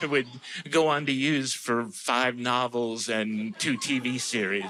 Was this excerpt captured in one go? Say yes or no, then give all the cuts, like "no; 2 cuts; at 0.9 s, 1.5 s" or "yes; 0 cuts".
yes; 0 cuts